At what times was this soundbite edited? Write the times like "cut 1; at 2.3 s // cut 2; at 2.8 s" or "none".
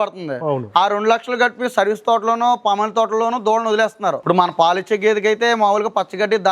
cut 1; at 4.2 s